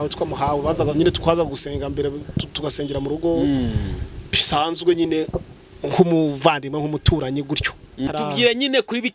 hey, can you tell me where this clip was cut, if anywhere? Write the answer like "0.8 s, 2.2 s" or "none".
8.1 s

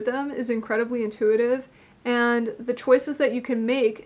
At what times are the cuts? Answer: none

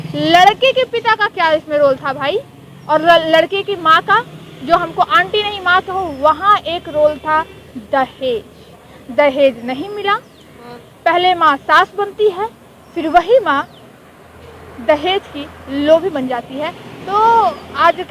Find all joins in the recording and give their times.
none

